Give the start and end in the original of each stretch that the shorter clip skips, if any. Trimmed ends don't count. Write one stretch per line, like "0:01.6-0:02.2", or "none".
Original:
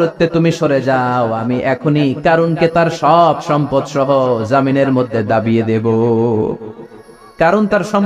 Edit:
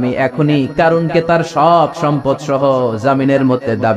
none